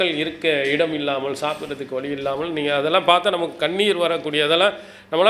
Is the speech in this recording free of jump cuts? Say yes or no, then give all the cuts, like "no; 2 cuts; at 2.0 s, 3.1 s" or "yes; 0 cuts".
yes; 0 cuts